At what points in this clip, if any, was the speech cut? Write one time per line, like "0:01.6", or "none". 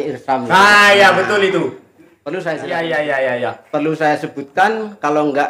0:02.6